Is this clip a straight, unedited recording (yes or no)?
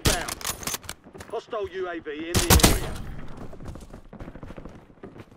yes